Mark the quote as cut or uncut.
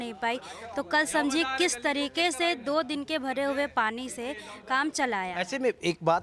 uncut